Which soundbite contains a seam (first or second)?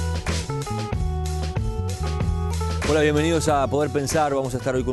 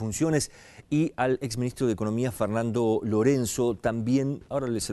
first